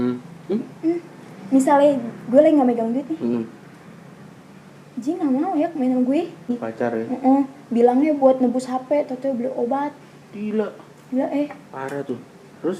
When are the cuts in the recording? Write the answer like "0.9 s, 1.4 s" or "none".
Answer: 6.5 s